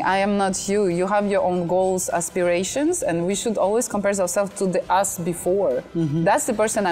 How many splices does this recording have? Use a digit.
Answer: 0